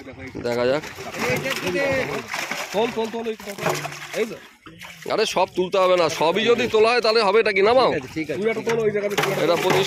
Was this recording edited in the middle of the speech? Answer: no; 0 cuts

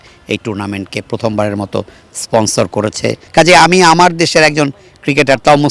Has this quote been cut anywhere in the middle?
yes; 1 cut; at 3.2 s

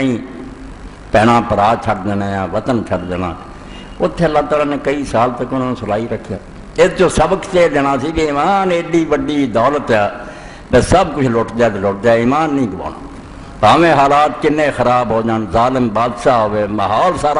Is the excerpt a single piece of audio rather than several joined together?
no; 1 cut; at 16.4 s

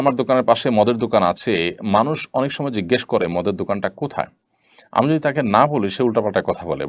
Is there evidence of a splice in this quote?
no; 0 cuts

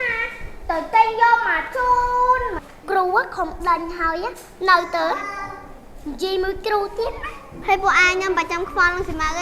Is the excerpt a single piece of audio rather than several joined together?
no; 2 cuts; at 2.6 s, 7.5 s

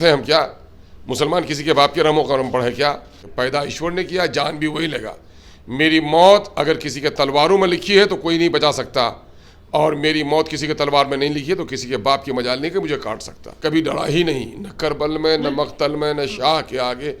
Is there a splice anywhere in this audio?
yes; 2 cuts; at 3.2 s, 13.6 s

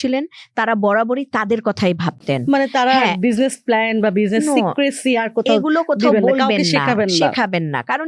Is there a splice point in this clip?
no; 0 cuts

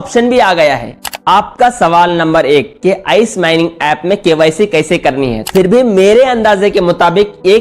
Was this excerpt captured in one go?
no; 2 cuts; at 1.1 s, 5.4 s

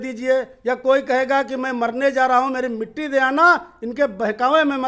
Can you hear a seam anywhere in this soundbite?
no; 0 cuts

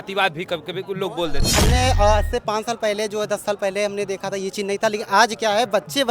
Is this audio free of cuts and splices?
no; 1 cut; at 1.5 s

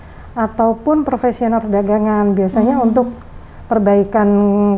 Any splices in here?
no; 0 cuts

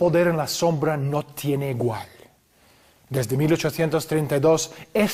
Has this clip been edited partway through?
no; 0 cuts

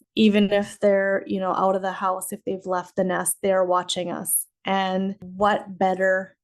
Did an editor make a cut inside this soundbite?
yes; 1 cut; at 5.2 s

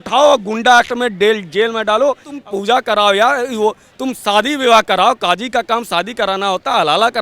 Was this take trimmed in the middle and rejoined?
yes; 1 cut; at 2.3 s

